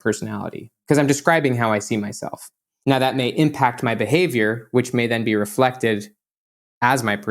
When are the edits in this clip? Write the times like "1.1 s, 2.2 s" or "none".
2.7 s